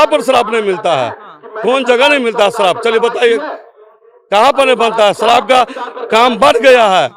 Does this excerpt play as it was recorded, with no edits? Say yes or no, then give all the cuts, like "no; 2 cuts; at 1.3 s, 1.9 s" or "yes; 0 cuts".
yes; 0 cuts